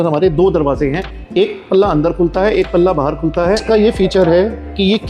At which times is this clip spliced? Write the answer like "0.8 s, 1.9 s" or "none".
3.6 s